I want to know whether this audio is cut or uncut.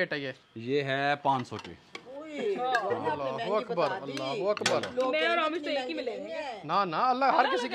uncut